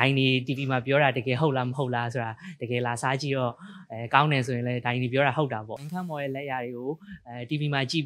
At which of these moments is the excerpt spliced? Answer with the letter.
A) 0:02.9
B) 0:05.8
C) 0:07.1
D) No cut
B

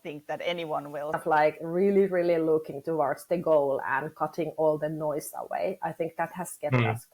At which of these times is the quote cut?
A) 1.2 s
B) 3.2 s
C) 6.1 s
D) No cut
A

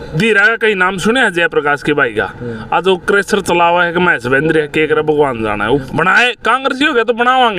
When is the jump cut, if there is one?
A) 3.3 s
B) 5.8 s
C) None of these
B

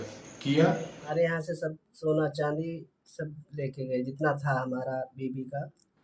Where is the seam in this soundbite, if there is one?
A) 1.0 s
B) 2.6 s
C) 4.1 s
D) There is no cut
A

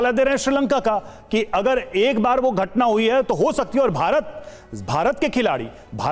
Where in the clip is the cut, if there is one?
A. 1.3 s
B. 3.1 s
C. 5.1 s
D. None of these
D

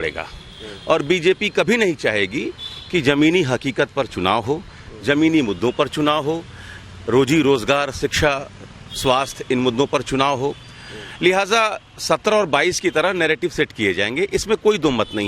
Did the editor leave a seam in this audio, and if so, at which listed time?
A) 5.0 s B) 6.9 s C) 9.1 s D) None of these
D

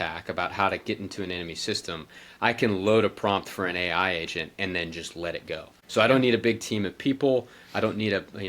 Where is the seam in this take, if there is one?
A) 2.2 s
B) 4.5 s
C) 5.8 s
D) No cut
C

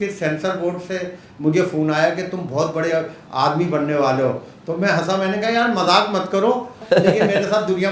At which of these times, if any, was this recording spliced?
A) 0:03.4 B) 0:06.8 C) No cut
B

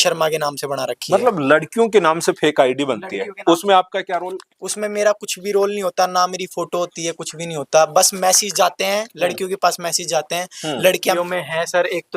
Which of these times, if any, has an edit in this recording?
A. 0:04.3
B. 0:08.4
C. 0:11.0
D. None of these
C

